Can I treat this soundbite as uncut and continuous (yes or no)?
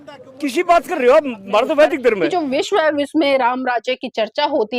no